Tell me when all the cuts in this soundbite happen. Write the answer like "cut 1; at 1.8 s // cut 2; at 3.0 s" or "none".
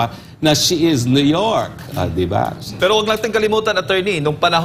cut 1; at 2.7 s